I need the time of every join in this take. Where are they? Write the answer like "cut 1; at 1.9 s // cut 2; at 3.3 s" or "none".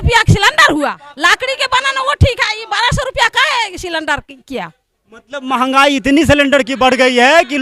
cut 1; at 1.0 s